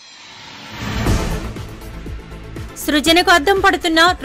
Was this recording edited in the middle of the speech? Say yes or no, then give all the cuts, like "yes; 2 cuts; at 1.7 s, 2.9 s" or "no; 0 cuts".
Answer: yes; 1 cut; at 1.8 s